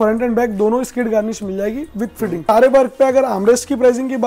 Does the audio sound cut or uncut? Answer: cut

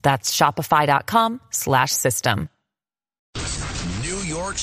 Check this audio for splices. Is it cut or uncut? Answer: cut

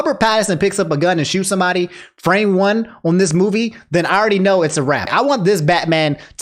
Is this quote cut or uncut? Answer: cut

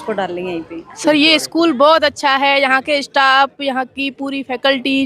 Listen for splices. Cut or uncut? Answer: cut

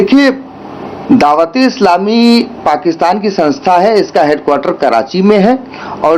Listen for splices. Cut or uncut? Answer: uncut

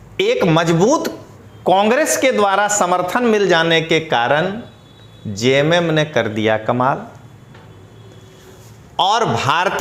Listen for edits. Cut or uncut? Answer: uncut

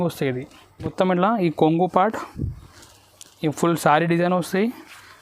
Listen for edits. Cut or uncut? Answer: cut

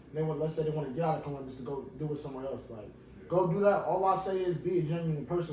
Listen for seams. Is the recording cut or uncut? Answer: uncut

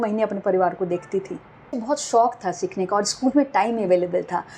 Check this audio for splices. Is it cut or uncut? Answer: cut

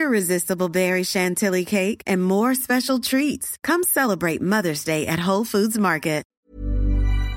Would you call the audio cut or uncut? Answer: cut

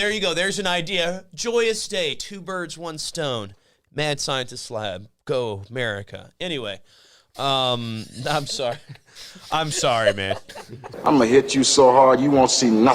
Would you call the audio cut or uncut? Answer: cut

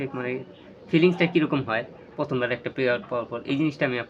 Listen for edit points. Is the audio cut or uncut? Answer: uncut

